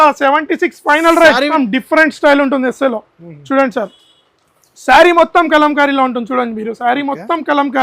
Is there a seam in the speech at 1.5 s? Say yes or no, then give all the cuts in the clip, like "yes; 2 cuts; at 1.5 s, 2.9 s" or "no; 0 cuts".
yes; 1 cut; at 1.5 s